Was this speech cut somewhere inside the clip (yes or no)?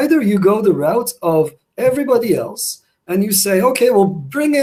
no